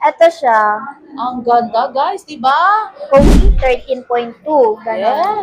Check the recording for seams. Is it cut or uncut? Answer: cut